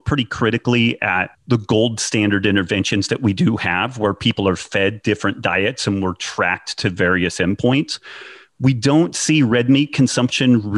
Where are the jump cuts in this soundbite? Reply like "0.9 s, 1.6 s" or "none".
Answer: 1.3 s

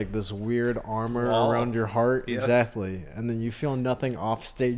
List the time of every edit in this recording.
none

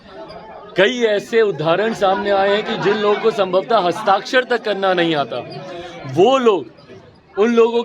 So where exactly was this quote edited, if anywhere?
none

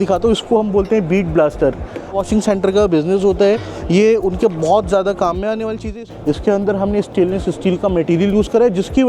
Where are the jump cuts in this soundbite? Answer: 2.1 s, 6.0 s

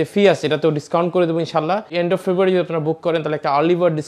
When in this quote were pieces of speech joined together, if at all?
1.9 s

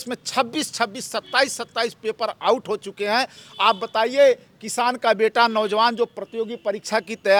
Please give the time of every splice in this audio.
none

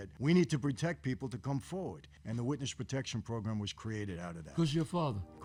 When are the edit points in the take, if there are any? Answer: none

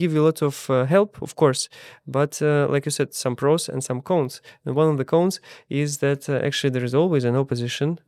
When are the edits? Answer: none

